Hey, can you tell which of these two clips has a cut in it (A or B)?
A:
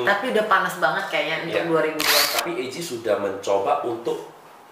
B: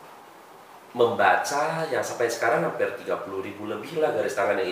A